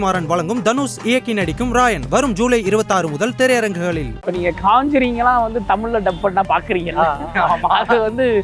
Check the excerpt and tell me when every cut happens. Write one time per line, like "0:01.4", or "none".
0:04.5